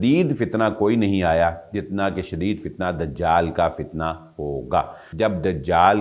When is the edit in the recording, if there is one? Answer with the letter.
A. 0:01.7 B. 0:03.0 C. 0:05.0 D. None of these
C